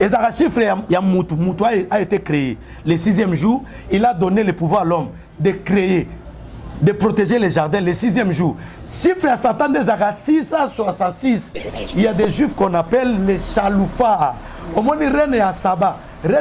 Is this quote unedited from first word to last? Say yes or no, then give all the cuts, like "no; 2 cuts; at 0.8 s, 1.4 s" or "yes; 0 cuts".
no; 1 cut; at 11.7 s